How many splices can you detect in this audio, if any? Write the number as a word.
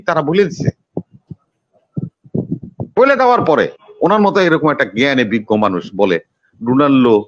zero